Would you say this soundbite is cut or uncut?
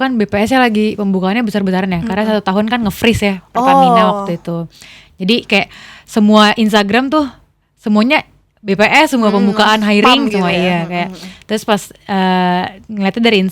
uncut